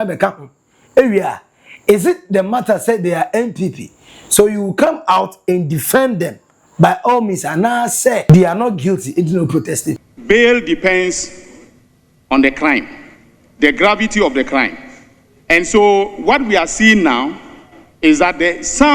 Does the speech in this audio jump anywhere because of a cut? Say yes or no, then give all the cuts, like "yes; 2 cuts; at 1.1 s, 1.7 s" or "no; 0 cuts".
yes; 2 cuts; at 8.3 s, 10.1 s